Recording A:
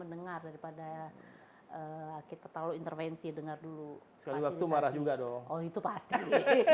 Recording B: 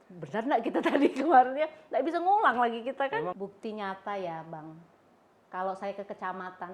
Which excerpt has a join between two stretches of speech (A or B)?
B